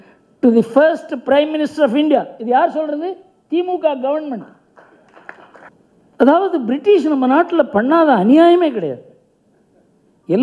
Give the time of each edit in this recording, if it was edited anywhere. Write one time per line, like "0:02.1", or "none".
0:05.8